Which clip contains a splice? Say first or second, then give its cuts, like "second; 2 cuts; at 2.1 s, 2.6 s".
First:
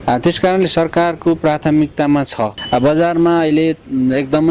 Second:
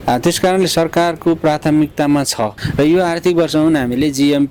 first; 1 cut; at 2.6 s